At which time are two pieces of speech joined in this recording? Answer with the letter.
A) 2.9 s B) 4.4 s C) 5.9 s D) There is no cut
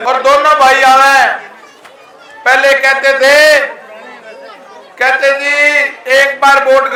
D